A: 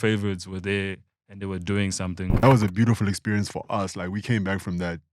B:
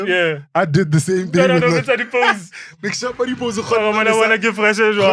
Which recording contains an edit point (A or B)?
A